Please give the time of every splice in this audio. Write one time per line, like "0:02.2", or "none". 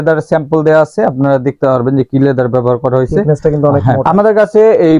0:04.0